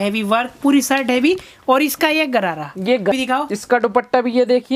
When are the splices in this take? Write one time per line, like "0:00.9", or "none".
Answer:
0:03.1